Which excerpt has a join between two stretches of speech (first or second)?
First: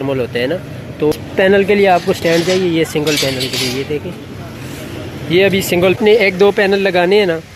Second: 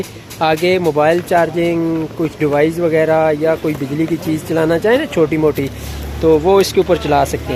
first